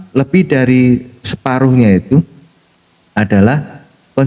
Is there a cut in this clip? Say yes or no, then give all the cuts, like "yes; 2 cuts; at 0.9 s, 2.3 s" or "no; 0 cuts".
no; 0 cuts